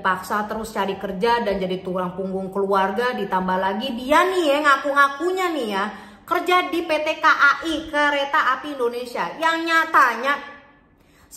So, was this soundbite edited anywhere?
no; 0 cuts

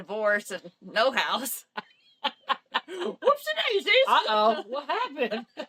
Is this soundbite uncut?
yes; 0 cuts

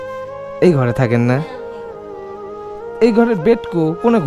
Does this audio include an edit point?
yes; 2 cuts; at 1.4 s, 3.0 s

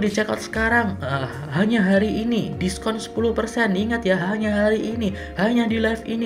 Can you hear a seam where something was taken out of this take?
no; 0 cuts

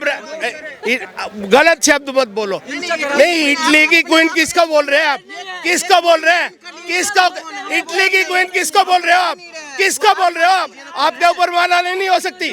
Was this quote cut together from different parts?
no; 0 cuts

